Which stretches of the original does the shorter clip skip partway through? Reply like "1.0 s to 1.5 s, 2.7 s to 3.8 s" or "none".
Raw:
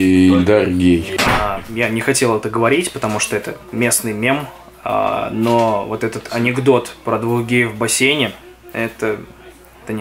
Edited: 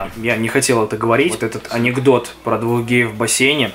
2.9 s to 6.0 s